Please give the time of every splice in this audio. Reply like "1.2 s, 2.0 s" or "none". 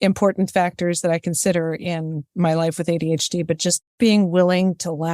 3.9 s